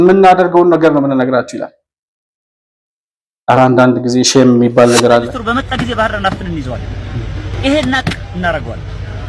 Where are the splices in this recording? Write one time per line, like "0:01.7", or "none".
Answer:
0:05.3

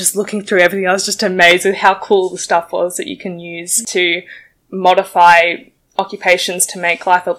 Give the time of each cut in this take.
0:03.7

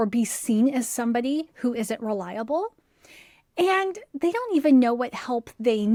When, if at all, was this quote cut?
none

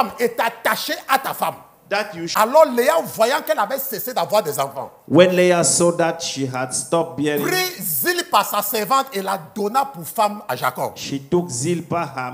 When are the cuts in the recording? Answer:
0:02.2

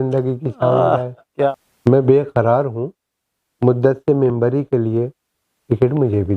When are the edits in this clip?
0:01.2

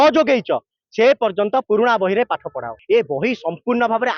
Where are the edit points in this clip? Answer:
0:02.7

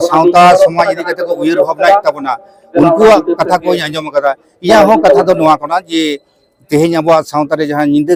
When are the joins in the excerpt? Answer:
none

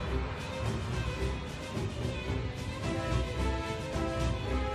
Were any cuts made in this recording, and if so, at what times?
none

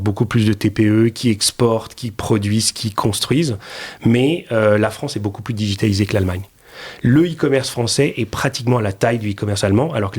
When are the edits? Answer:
none

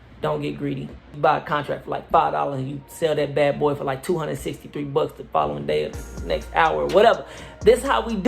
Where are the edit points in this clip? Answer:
0:01.1

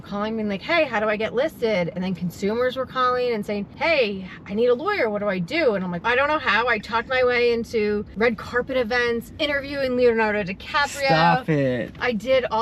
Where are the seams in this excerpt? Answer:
0:03.7
0:06.0
0:08.1

